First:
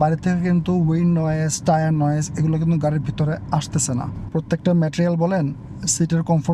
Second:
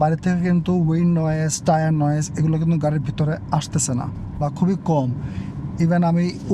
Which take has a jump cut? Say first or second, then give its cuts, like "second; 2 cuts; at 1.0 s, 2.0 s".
first; 1 cut; at 4.2 s